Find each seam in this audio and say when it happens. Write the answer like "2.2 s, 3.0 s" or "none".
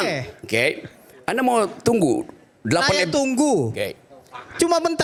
none